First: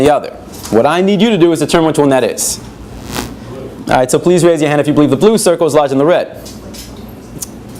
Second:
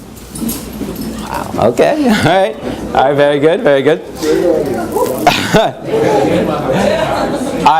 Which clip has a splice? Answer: second; 1 cut; at 2.3 s

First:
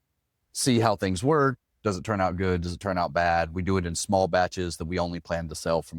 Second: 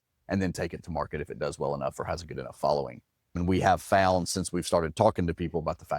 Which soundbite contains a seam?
second; 1 cut; at 3.4 s

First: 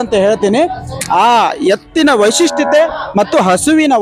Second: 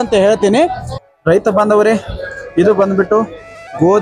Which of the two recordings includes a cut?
second; 1 cut; at 1.0 s

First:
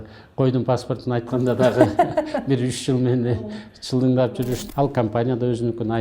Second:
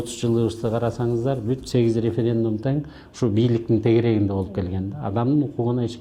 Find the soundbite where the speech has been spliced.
first; 1 cut; at 4.6 s

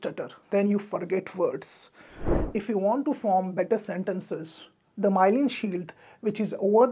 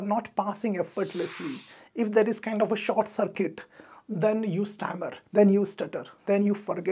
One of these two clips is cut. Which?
first; 1 cut; at 2.4 s

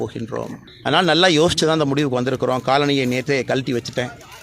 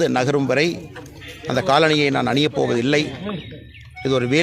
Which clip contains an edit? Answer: first; 1 cut; at 1.0 s

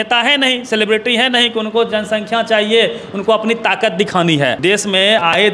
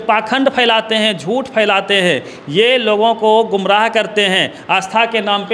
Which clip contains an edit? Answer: first; 1 cut; at 4.6 s

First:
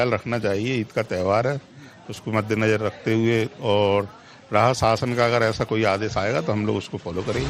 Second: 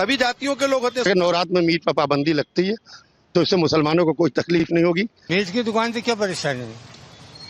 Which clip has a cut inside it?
first; 1 cut; at 6.6 s

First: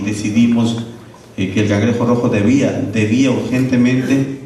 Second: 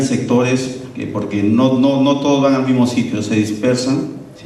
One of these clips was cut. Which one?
second; 1 cut; at 2.5 s

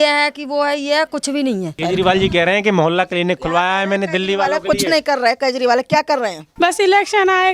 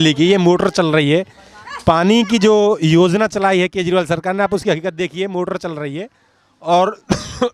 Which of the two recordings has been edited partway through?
first; 2 cuts; at 1.7 s, 6.4 s

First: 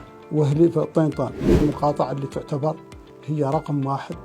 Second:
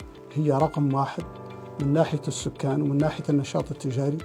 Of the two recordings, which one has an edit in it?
first; 1 cut; at 1.5 s

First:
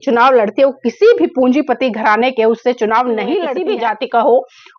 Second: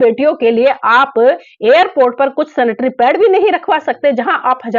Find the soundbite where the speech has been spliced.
first; 1 cut; at 3.5 s

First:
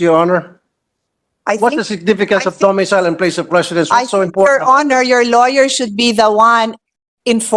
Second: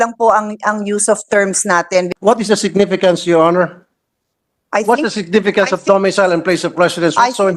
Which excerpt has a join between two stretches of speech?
second; 1 cut; at 2.1 s

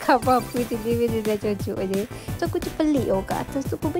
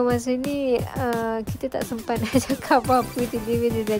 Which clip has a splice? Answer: first; 1 cut; at 2.4 s

